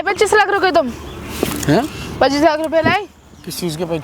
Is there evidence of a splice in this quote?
no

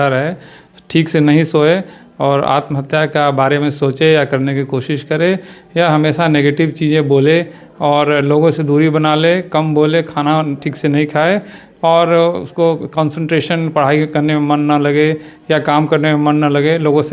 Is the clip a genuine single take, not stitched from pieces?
yes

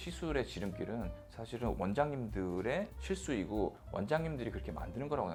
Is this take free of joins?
yes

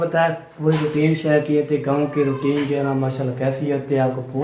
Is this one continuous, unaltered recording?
yes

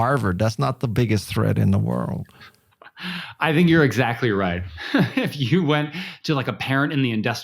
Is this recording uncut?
no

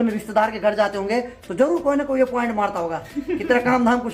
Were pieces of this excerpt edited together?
no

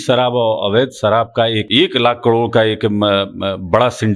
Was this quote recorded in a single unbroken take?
no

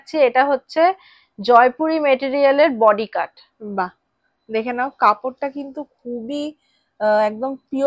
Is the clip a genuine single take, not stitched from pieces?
yes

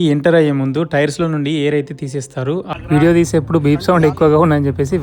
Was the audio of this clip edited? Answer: yes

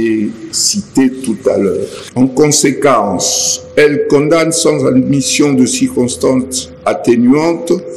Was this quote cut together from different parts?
yes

